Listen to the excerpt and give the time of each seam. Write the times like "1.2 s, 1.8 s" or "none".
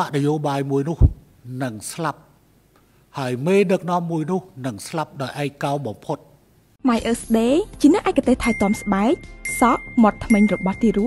6.7 s